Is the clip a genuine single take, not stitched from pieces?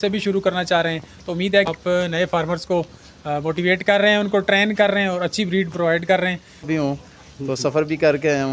no; 2 cuts; at 1.7 s, 6.7 s

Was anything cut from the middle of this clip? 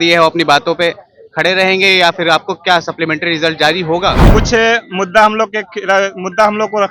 yes; 1 cut; at 4.2 s

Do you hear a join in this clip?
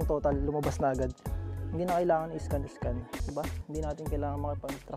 yes; 1 cut; at 3.2 s

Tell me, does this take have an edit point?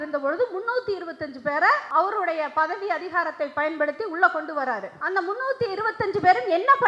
yes; 2 cuts; at 1.8 s, 4.9 s

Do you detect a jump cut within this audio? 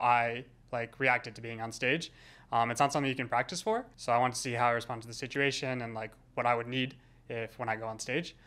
yes; 1 cut; at 3.9 s

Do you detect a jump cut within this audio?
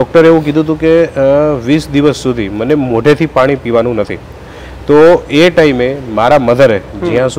no; 0 cuts

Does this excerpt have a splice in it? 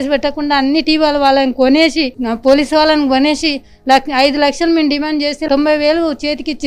no; 0 cuts

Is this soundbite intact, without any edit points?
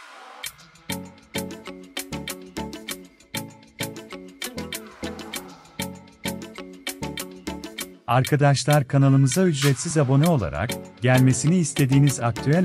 no; 1 cut; at 8.0 s

